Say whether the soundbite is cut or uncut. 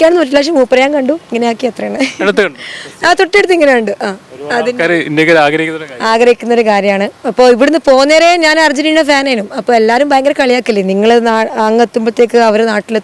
uncut